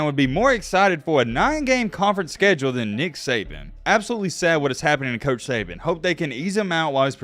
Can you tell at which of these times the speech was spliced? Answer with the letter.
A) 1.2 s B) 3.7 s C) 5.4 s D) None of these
B